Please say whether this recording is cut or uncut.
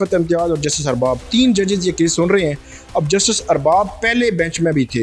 uncut